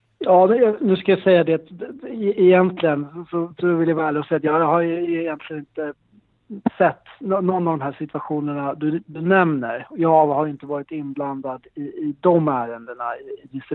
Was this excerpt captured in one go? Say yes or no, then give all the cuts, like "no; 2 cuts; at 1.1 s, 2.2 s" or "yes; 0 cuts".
yes; 0 cuts